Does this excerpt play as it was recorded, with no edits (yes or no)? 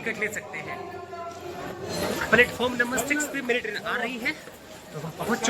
no